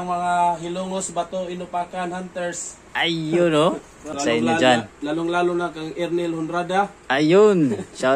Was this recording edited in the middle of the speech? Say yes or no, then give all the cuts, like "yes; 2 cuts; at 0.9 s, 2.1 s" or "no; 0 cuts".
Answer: yes; 1 cut; at 4.2 s